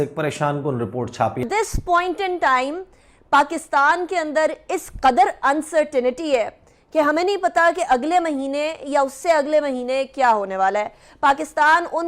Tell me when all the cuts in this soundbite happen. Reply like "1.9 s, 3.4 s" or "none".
1.4 s